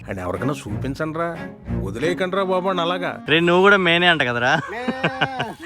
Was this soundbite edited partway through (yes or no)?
yes